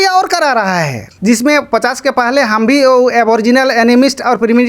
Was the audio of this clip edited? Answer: yes; 1 cut; at 1.0 s

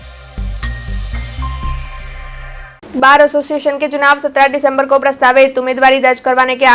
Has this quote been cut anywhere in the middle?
yes; 1 cut; at 2.6 s

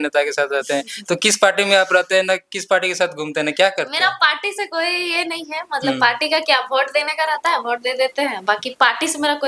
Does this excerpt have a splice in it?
no; 0 cuts

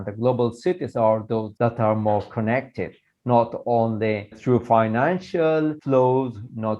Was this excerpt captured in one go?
no; 2 cuts; at 1.5 s, 4.3 s

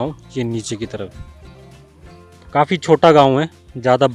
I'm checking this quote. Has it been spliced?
no; 0 cuts

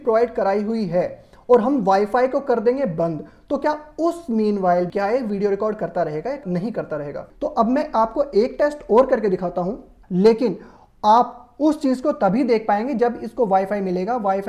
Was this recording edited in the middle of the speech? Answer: yes; 3 cuts; at 4.9 s, 6.9 s, 9.9 s

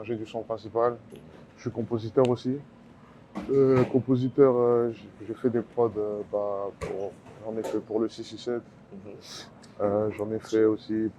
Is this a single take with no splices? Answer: yes; 0 cuts

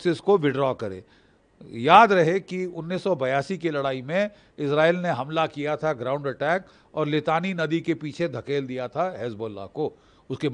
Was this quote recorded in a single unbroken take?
yes; 0 cuts

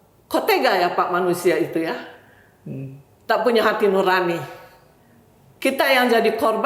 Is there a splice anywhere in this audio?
no; 0 cuts

